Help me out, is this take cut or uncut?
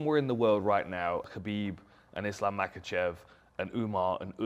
cut